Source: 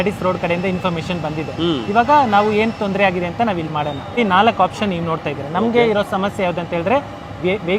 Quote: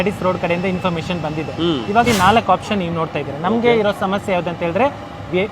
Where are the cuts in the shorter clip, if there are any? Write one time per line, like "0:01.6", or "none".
0:02.1

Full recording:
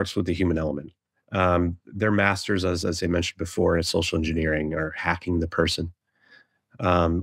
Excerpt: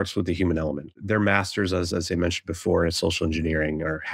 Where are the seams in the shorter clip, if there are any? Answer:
0:00.9

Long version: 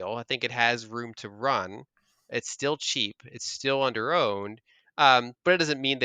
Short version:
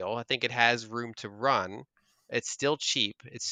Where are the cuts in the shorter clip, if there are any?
none

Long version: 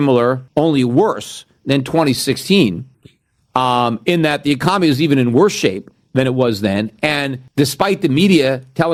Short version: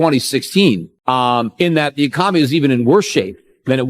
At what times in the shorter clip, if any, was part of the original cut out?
0:00.9

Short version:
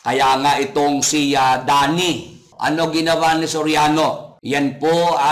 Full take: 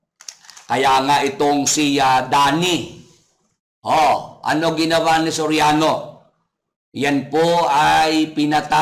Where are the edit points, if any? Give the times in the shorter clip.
0:02.5
0:04.3

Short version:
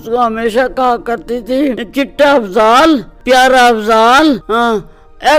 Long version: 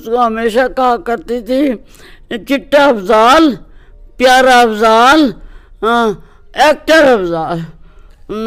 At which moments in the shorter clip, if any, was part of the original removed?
0:01.8
0:03.1
0:04.4

